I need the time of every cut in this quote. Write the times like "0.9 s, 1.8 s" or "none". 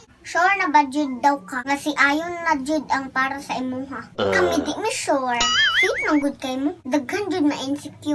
none